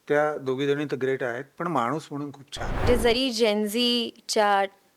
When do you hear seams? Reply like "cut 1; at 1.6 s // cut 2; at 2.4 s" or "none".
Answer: cut 1; at 2.8 s